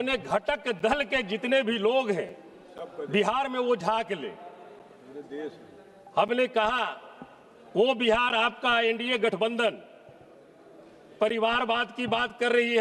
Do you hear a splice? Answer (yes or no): no